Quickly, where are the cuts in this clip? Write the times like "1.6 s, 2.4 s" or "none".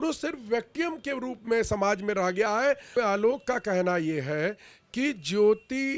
2.9 s